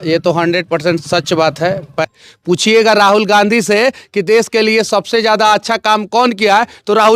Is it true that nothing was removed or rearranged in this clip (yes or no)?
no